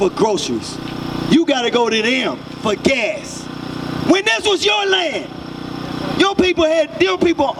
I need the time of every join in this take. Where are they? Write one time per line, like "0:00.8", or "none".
none

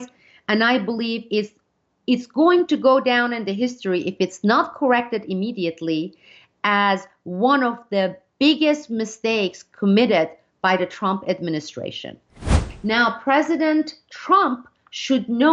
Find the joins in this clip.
0:12.5

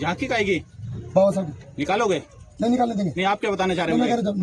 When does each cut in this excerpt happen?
none

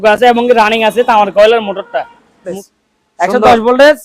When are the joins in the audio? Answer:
0:02.6

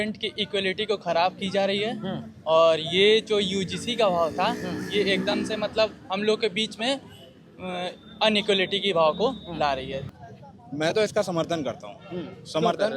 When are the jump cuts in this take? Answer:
0:10.1

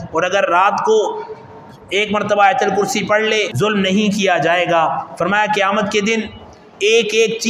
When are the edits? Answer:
0:03.5

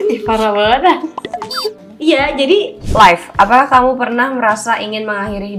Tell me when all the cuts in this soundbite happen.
0:01.8
0:02.8

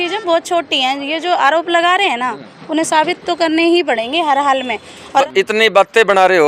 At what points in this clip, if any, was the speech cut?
0:05.3

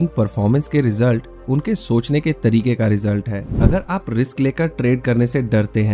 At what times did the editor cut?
0:03.6

